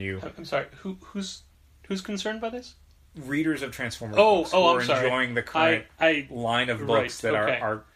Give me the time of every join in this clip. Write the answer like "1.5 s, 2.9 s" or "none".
1.5 s